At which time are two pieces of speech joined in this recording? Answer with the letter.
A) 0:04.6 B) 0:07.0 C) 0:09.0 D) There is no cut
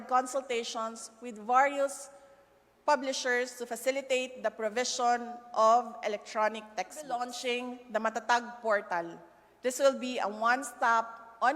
B